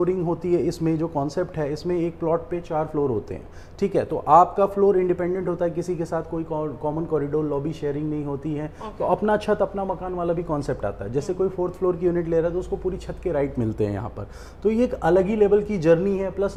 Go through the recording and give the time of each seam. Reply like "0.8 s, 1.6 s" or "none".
none

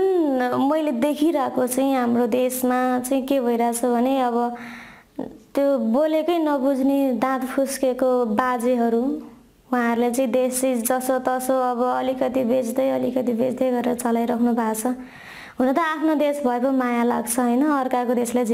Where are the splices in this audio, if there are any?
none

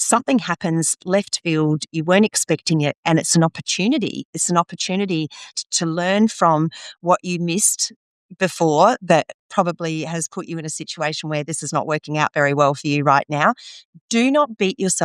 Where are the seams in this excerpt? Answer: 5.5 s

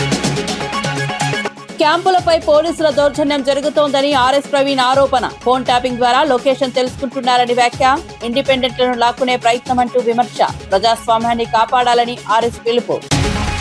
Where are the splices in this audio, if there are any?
none

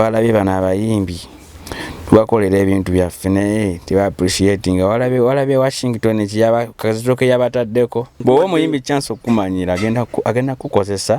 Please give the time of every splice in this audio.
8.2 s

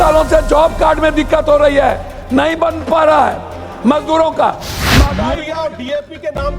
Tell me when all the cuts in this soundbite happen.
5.1 s

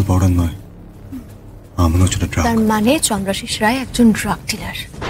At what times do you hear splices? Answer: 2.4 s

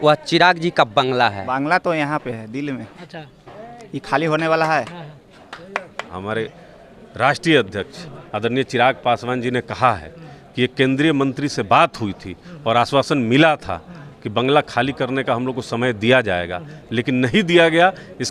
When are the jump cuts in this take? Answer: 1.4 s, 6.2 s

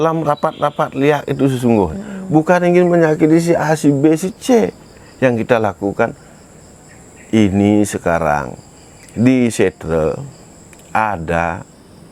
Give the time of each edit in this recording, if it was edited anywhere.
none

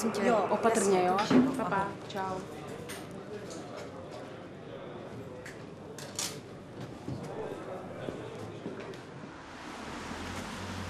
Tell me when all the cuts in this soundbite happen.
9.3 s

